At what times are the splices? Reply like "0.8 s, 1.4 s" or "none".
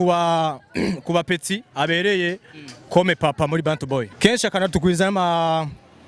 4.1 s